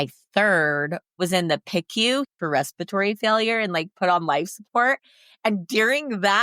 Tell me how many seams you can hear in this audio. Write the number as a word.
two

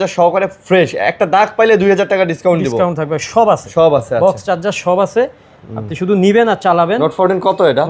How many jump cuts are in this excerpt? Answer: zero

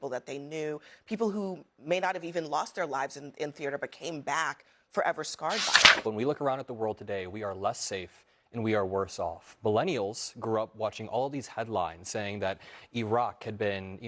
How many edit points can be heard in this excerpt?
one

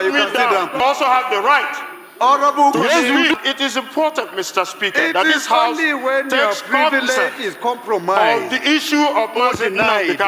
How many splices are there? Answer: two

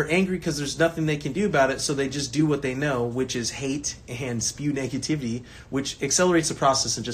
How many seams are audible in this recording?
zero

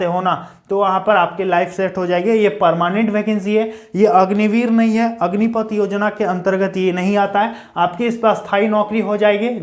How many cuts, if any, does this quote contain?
zero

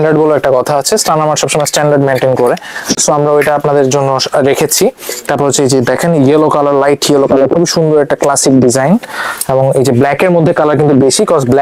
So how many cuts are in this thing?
zero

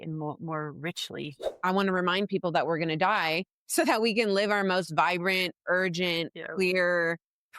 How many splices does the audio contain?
one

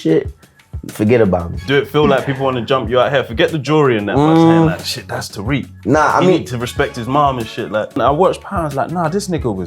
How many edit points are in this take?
two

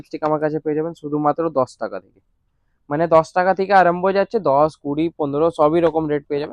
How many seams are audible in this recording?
zero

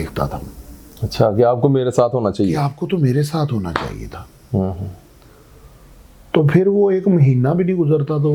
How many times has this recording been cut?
zero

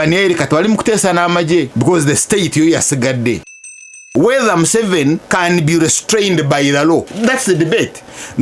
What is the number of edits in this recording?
four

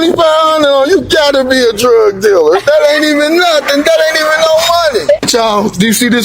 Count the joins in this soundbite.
one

